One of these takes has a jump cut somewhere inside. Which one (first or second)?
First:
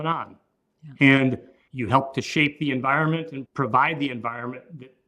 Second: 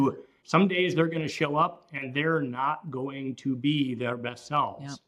first